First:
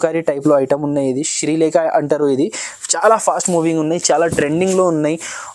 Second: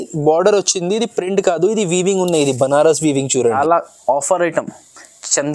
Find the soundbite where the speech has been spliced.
second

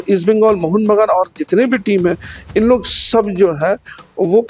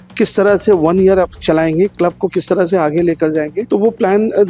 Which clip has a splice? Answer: second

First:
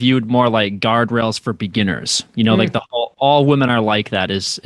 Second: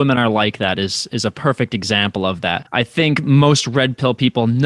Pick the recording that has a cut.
second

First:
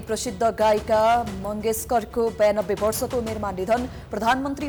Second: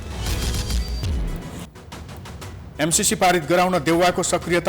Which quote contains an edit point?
second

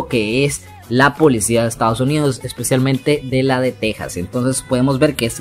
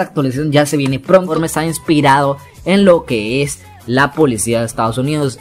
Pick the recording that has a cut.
second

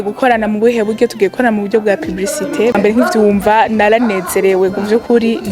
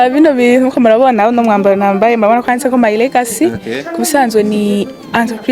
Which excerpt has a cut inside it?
first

